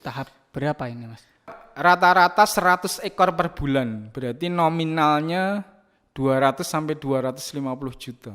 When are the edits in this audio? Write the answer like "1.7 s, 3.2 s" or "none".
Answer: 1.6 s

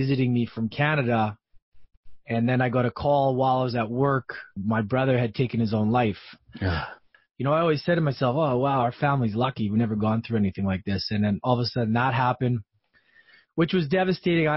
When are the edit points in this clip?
4.6 s, 6.9 s

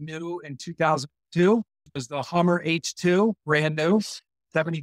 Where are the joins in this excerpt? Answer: 1.9 s

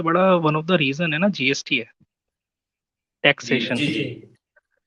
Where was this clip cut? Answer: none

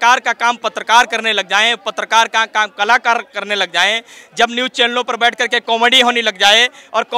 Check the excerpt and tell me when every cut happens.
none

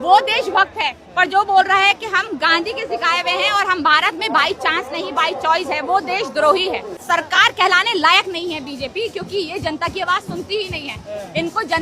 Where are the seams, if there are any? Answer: 7.0 s

